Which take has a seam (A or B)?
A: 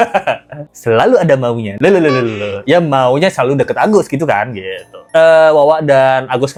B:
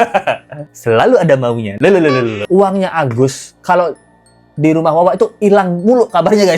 B